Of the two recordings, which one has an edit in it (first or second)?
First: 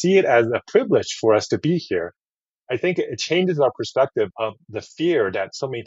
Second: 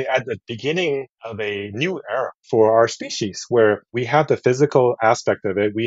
second